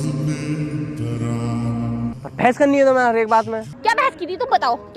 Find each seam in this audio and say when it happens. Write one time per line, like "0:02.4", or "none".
0:02.1
0:03.7